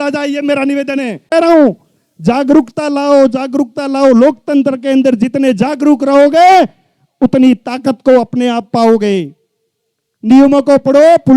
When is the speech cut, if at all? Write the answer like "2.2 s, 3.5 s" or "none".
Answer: 1.2 s